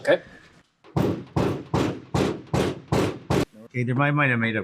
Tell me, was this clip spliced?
yes; 1 cut; at 3.6 s

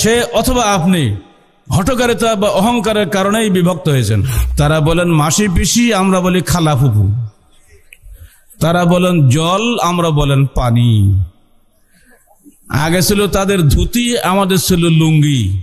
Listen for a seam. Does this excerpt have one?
yes; 1 cut; at 4.4 s

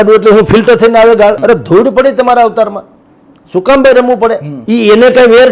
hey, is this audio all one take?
no; 2 cuts; at 1.4 s, 4.5 s

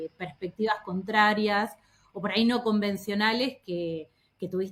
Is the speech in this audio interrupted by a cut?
no; 0 cuts

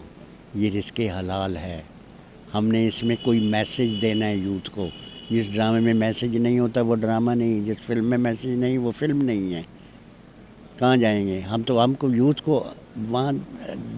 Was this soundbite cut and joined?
no; 0 cuts

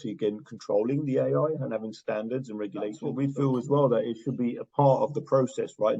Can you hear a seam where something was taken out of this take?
yes; 1 cut; at 3.0 s

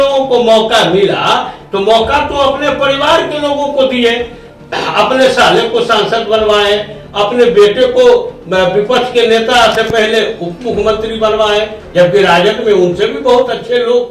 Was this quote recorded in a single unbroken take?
yes; 0 cuts

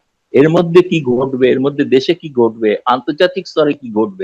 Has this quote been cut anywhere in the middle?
no; 0 cuts

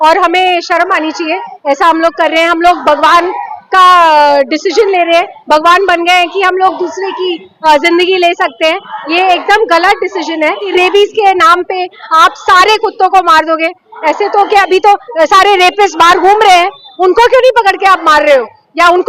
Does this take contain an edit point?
yes; 1 cut; at 10.6 s

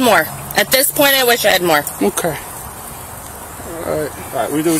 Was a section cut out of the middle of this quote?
no; 0 cuts

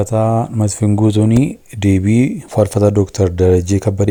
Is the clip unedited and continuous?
yes; 0 cuts

